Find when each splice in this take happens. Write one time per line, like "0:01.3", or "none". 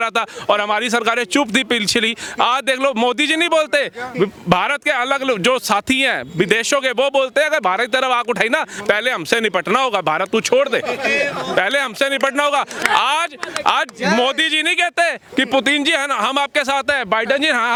none